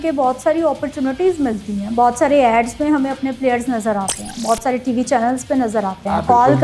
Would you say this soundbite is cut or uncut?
uncut